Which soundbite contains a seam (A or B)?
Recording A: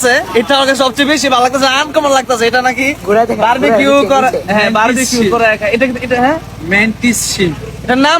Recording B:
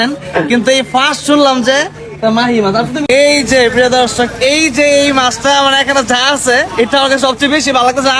B